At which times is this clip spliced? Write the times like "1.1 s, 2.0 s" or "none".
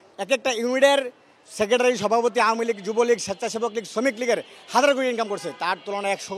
none